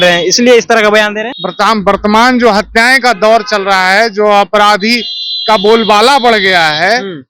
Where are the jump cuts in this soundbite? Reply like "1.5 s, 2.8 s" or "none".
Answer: 1.3 s